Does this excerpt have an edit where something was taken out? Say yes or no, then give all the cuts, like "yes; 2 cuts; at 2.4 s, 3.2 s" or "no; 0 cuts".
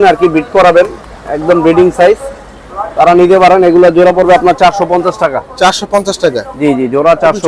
no; 0 cuts